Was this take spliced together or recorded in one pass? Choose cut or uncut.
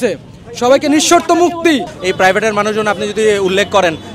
cut